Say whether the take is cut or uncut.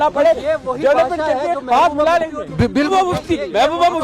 cut